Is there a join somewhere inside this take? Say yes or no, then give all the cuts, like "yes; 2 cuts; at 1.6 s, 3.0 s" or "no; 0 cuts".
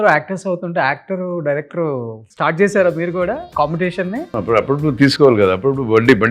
yes; 3 cuts; at 2.2 s, 3.5 s, 4.3 s